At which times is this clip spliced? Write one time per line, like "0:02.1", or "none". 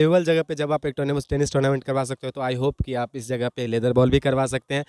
none